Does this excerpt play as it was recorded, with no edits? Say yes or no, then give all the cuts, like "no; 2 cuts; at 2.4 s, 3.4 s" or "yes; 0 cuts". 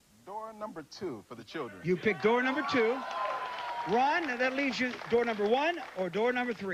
yes; 0 cuts